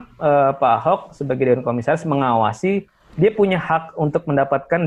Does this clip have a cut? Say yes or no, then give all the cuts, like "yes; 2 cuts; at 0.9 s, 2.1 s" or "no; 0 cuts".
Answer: no; 0 cuts